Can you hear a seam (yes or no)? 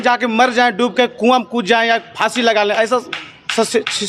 no